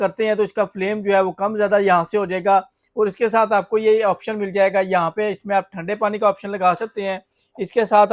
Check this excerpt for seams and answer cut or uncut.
uncut